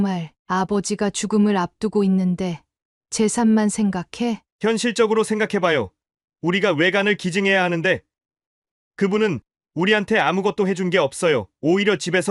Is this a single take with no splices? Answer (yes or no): yes